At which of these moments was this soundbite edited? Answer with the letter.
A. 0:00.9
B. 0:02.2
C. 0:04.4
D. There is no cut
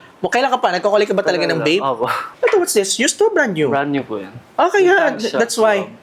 B